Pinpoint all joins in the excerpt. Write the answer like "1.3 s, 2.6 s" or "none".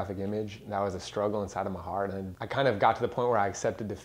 2.3 s